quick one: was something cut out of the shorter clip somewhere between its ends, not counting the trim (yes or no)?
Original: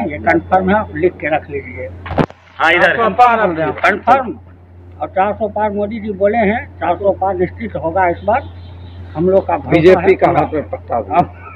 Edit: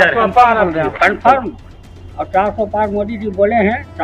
no